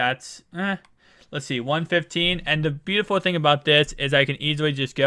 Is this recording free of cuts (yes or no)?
no